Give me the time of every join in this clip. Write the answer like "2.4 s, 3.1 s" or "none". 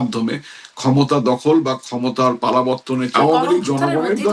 3.1 s